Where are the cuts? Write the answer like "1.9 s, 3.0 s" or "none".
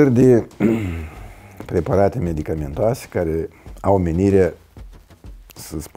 none